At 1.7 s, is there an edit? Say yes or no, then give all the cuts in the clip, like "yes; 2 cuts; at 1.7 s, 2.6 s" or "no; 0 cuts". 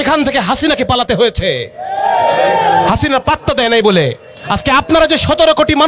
no; 0 cuts